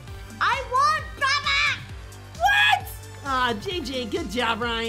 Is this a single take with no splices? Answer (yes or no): yes